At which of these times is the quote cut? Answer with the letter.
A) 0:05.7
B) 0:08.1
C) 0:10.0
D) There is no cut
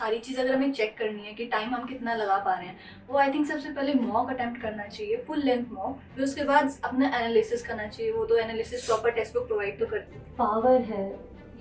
C